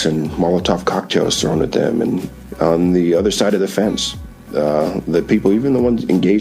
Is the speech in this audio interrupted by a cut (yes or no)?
yes